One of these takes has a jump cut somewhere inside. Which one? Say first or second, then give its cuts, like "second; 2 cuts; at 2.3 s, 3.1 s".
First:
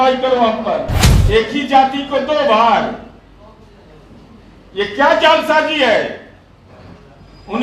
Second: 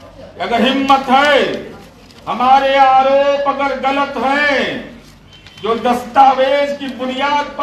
first; 1 cut; at 1.0 s